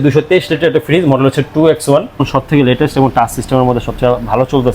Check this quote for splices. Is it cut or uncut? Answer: cut